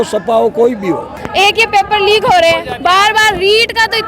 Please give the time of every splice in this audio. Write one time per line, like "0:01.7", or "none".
0:01.1